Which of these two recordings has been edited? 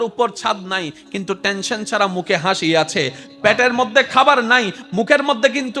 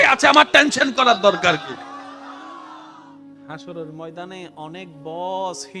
second; 1 cut; at 3.5 s

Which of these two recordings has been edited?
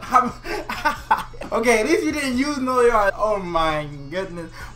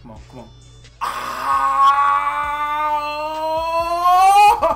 first; 2 cuts; at 1.3 s, 3.1 s

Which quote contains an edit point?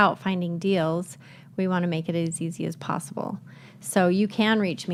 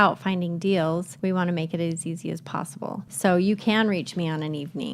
second; 2 cuts; at 1.1 s, 3.1 s

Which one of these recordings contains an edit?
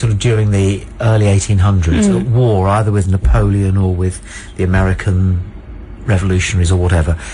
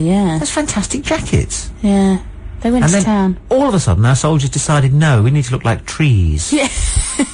first; 1 cut; at 1.6 s

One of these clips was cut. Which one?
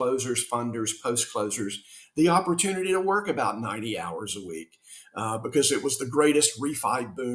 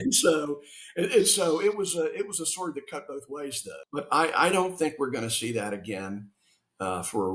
second; 1 cut; at 3.7 s

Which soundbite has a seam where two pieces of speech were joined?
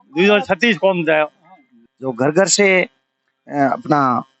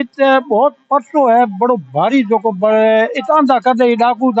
first; 1 cut; at 1.7 s

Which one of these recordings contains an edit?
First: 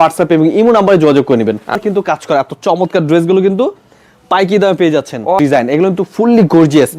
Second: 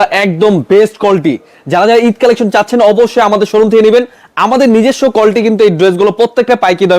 first; 2 cuts; at 1.8 s, 5.4 s

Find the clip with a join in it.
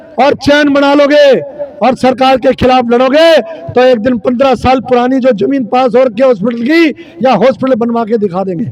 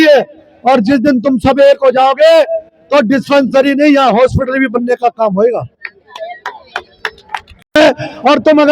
second; 1 cut; at 7.8 s

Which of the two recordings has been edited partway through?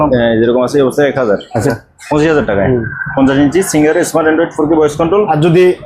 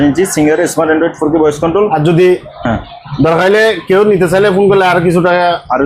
first; 1 cut; at 1.7 s

